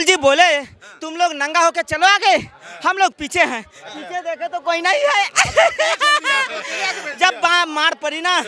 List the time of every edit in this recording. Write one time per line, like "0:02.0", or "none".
none